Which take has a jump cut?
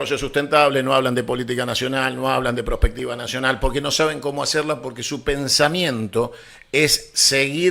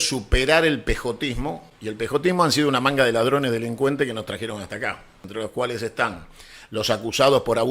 second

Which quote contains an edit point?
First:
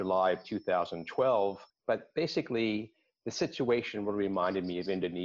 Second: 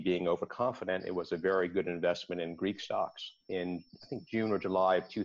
first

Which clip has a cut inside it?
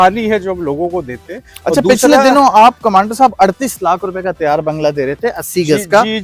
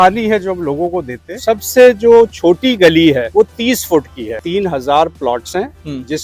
second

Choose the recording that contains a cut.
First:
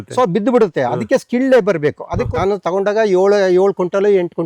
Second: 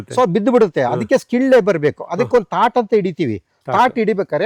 first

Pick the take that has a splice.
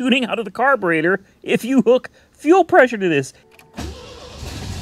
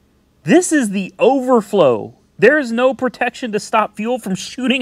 first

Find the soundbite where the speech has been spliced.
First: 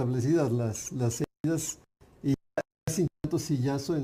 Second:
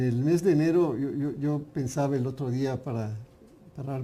first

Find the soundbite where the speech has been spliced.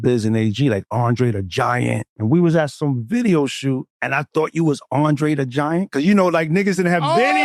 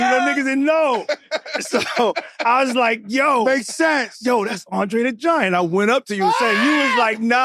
first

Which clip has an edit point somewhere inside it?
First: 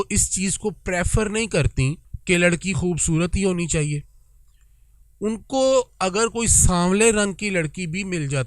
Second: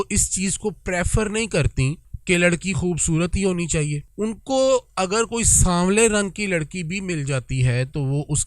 second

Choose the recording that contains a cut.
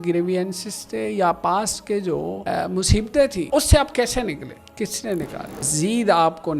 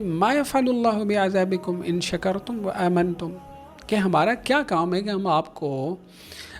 first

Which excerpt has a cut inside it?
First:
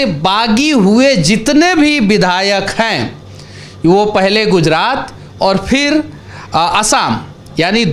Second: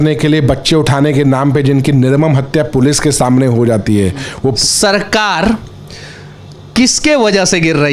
second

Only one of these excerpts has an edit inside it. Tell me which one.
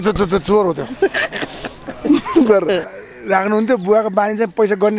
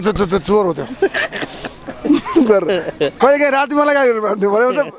first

